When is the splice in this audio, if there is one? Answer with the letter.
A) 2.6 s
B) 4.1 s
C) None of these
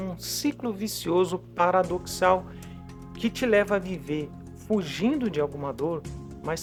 C